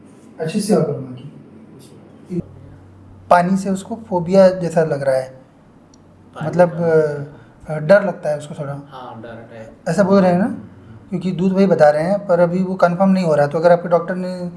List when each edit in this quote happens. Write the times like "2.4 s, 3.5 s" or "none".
2.4 s